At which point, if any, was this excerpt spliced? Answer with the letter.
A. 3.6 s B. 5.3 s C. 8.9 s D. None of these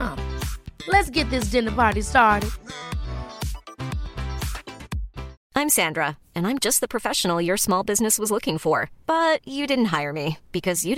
B